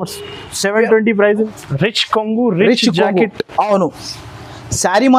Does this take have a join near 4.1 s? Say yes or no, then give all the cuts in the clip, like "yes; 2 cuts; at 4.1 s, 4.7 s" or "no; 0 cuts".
no; 1 cut; at 1.5 s